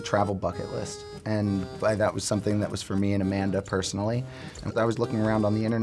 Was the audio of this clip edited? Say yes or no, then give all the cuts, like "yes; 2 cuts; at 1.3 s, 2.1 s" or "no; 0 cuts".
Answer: yes; 1 cut; at 4.7 s